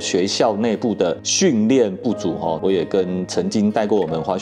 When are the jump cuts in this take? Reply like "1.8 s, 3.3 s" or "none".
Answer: 2.6 s